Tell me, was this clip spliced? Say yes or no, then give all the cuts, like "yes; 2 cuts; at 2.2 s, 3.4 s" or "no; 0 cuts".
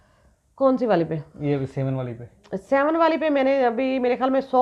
no; 0 cuts